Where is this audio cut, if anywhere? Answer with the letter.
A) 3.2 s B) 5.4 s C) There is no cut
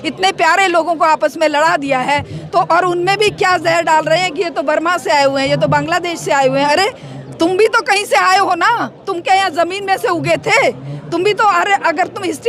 C